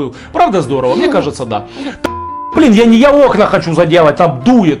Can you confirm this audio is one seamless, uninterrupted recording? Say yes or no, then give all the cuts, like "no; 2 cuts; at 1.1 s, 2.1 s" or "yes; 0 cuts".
no; 1 cut; at 2.0 s